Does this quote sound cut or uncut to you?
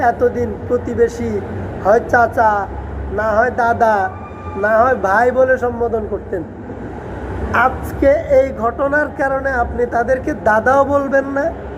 uncut